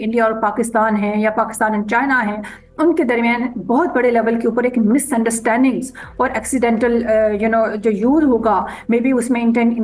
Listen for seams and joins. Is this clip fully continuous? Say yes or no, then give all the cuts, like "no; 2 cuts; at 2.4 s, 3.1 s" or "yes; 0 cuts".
yes; 0 cuts